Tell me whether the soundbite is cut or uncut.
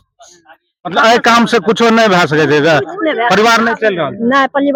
uncut